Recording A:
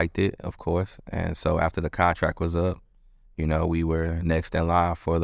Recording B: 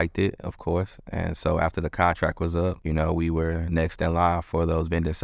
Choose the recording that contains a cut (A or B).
B